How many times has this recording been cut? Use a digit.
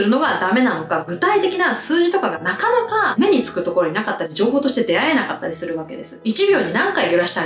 0